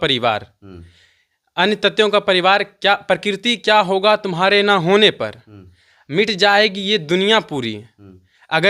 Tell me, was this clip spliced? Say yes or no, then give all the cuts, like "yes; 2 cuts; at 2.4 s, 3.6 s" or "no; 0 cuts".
no; 0 cuts